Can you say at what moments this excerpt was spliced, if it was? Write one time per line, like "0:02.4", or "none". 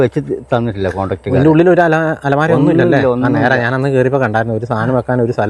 none